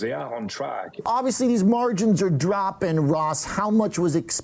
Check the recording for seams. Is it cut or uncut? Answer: cut